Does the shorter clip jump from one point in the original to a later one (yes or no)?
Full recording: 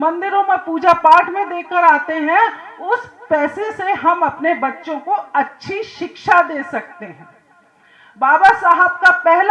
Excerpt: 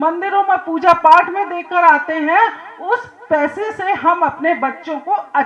no